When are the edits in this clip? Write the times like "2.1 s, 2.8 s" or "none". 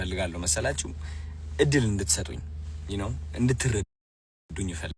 none